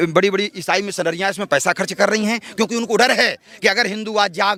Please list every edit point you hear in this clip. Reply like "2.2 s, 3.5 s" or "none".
none